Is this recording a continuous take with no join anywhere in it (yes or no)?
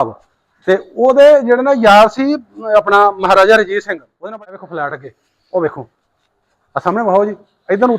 no